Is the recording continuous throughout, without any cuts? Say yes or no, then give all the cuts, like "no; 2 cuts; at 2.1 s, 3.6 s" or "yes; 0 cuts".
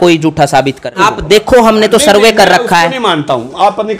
no; 1 cut; at 1.0 s